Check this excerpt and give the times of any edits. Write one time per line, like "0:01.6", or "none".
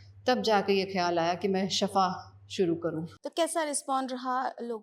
none